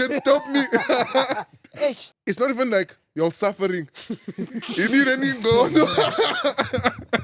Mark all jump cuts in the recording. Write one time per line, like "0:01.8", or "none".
0:02.1